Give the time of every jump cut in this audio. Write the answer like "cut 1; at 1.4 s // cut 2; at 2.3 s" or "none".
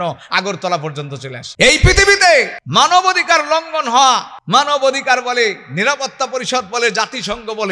cut 1; at 1.4 s // cut 2; at 2.6 s // cut 3; at 4.3 s